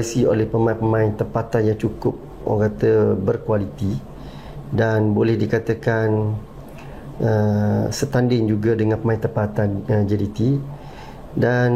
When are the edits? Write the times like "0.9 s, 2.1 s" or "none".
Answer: none